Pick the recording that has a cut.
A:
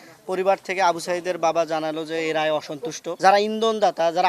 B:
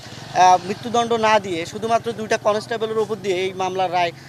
A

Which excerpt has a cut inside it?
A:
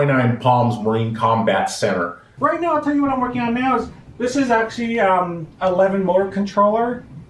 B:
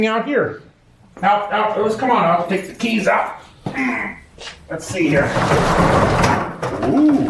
A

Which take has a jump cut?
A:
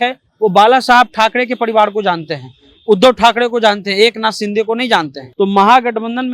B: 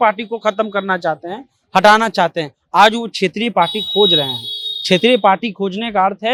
A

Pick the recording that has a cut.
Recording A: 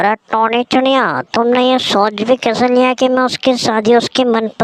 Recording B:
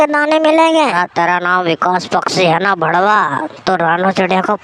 B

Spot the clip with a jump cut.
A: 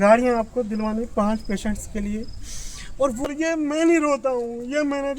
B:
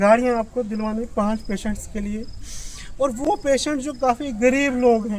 A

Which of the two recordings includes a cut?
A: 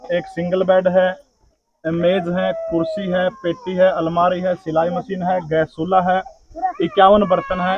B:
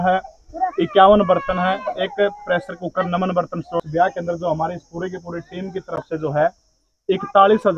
B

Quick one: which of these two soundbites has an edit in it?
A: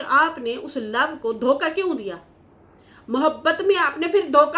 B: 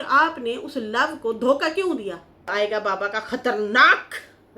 B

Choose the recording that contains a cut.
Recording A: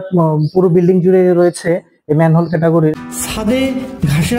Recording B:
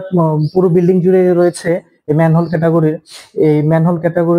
A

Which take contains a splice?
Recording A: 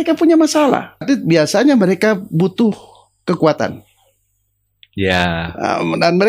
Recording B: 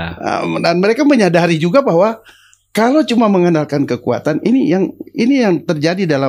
A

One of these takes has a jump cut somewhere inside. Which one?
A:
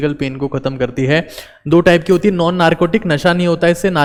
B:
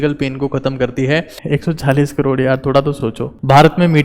B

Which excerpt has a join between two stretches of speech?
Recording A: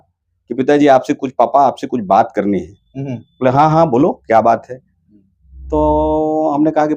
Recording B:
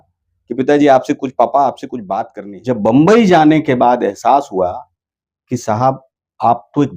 B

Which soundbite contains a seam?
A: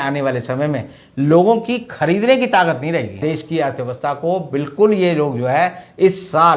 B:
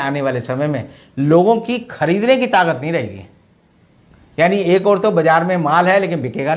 A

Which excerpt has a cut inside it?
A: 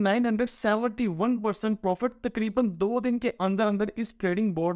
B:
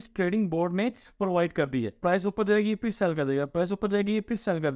B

